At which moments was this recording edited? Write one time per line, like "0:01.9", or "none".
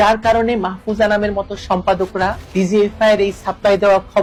none